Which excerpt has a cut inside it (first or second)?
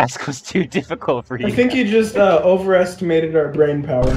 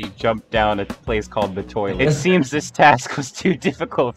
second